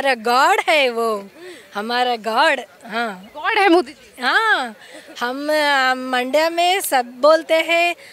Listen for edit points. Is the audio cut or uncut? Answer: uncut